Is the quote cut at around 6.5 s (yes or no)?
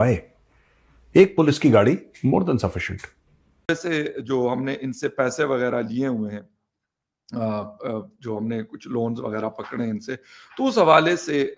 no